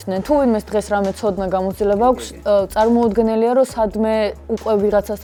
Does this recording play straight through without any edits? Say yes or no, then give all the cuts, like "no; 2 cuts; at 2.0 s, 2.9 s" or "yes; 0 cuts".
yes; 0 cuts